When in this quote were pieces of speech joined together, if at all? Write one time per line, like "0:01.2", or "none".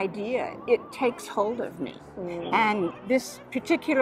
none